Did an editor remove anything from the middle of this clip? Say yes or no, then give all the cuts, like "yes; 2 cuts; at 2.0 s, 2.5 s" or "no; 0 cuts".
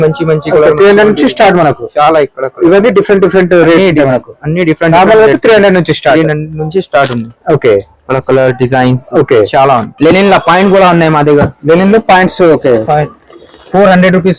yes; 1 cut; at 9.9 s